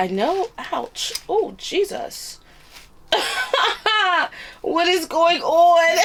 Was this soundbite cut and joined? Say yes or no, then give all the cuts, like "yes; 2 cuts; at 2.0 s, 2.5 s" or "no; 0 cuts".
no; 0 cuts